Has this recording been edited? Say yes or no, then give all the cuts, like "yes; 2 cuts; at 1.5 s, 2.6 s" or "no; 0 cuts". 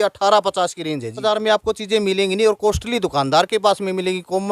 yes; 1 cut; at 1.2 s